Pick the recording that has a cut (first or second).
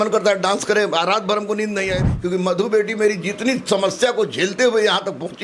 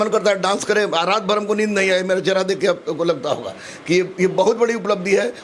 first